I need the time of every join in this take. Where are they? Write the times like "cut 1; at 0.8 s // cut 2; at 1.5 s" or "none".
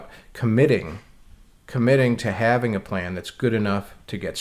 none